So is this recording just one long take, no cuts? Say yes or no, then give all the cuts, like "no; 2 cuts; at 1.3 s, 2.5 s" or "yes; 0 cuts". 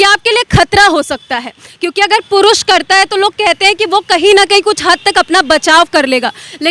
yes; 0 cuts